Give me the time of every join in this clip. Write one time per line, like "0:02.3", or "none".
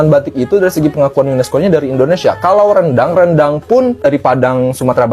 none